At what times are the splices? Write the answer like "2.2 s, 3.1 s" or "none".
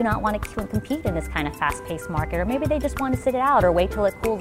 3.2 s